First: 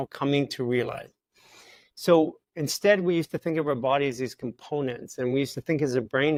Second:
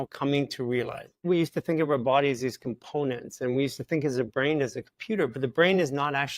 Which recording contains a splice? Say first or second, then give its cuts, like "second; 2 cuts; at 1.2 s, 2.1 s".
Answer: second; 1 cut; at 1.2 s